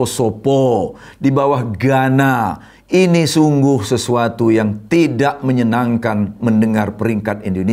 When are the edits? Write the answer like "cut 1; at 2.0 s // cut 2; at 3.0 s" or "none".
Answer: none